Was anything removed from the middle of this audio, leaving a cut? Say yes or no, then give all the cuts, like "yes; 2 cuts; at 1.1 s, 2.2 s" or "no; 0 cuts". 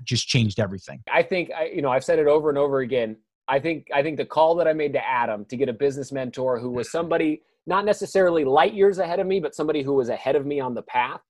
yes; 1 cut; at 1.1 s